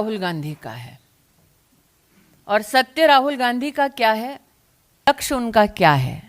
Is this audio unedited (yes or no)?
no